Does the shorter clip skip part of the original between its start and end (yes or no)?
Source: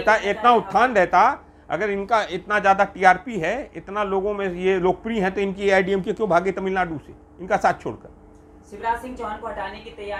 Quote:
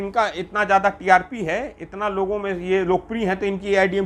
no